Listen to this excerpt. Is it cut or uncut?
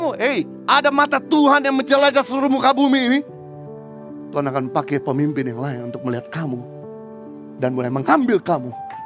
uncut